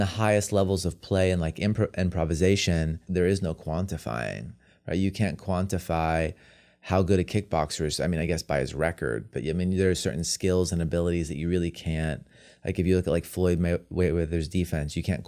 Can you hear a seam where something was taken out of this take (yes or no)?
yes